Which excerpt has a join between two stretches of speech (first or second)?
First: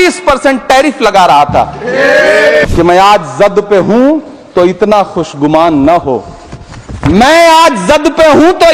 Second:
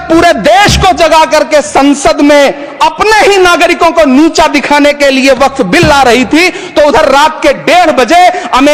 first